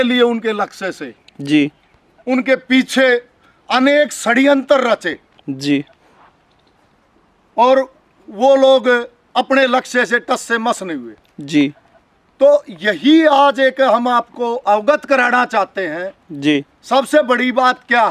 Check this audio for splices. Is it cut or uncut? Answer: uncut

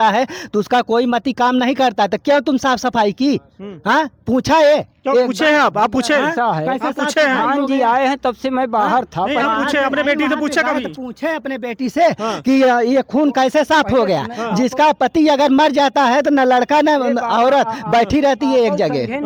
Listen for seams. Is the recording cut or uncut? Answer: uncut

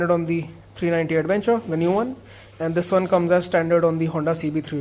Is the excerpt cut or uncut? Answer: uncut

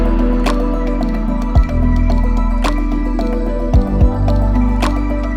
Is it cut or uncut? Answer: uncut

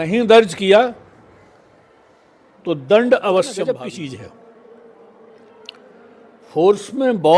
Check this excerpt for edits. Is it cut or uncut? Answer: cut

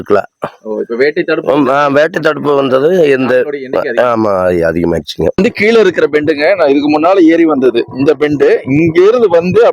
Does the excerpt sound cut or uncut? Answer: cut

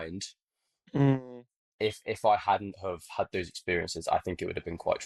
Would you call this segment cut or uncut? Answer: uncut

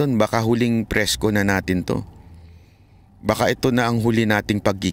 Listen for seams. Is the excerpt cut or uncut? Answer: uncut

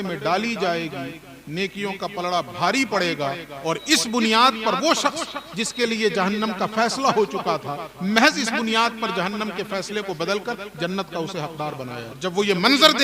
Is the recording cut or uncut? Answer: cut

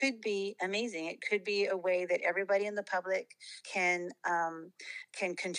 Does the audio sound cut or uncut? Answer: uncut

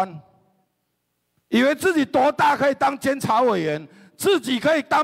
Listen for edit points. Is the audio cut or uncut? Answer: uncut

